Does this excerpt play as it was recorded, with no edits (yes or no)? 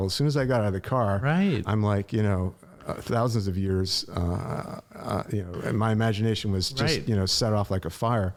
yes